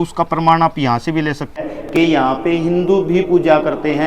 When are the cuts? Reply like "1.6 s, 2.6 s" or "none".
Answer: 1.7 s